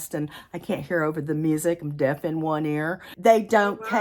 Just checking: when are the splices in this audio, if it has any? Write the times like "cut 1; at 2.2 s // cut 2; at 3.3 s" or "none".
cut 1; at 3.0 s